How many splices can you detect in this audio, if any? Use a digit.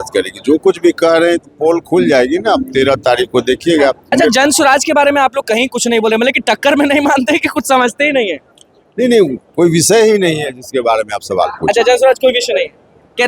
1